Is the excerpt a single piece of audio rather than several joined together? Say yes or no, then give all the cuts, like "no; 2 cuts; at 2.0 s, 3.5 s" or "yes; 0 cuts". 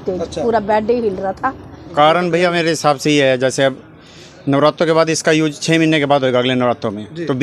no; 1 cut; at 1.8 s